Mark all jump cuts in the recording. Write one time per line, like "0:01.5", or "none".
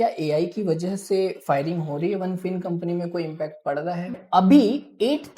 0:04.2